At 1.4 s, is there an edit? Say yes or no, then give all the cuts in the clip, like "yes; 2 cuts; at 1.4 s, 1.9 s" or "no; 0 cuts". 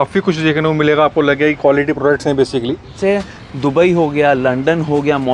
no; 1 cut; at 3.0 s